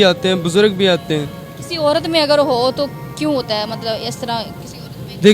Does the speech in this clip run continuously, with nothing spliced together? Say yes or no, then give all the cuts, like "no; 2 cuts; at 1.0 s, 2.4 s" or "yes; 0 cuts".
yes; 0 cuts